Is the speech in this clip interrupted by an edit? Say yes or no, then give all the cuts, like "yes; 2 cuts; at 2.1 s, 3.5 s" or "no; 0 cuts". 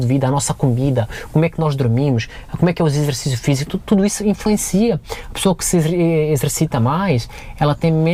no; 0 cuts